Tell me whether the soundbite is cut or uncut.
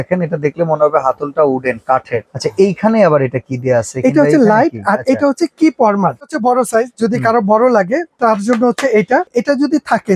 cut